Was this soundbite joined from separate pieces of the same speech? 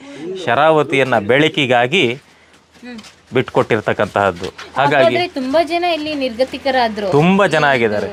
no; 0 cuts

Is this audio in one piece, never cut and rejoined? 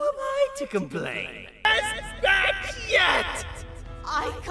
no; 1 cut; at 1.6 s

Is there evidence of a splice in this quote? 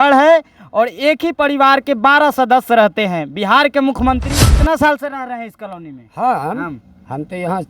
yes; 1 cut; at 4.3 s

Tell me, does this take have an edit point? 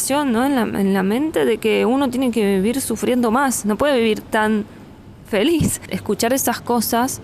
yes; 1 cut; at 5.9 s

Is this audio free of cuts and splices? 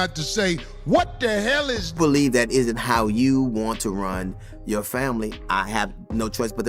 no; 1 cut; at 2.0 s

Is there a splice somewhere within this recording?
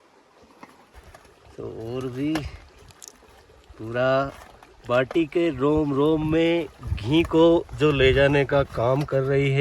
no; 0 cuts

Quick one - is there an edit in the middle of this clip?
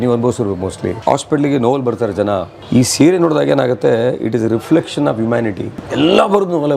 yes; 3 cuts; at 0.9 s, 2.5 s, 5.8 s

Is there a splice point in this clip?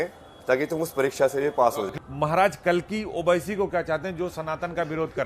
yes; 1 cut; at 1.9 s

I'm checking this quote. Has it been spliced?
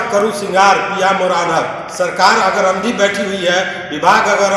no; 0 cuts

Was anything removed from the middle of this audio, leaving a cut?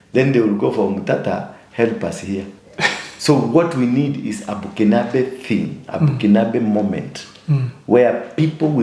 yes; 1 cut; at 2.6 s

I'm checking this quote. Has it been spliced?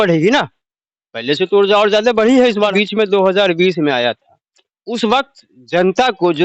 yes; 1 cut; at 2.7 s

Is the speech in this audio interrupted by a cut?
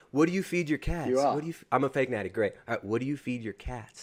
no; 0 cuts

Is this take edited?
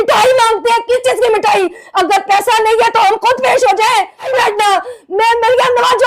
yes; 1 cut; at 4.3 s

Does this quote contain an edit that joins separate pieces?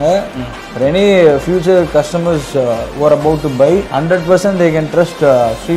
yes; 1 cut; at 3.9 s

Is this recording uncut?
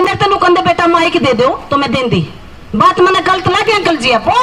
yes; 0 cuts

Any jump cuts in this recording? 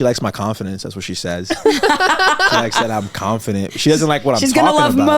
yes; 1 cut; at 2.5 s

